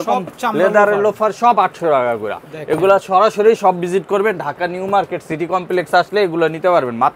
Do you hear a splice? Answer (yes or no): no